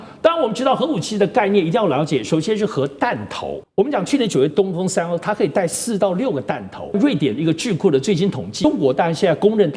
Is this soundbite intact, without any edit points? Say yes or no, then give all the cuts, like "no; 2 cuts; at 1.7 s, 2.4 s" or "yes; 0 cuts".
no; 4 cuts; at 3.6 s, 4.5 s, 7.0 s, 8.7 s